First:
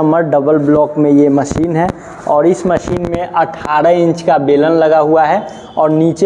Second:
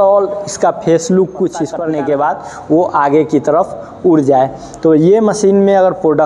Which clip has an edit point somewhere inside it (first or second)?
second